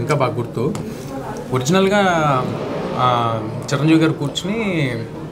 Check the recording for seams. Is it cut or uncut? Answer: uncut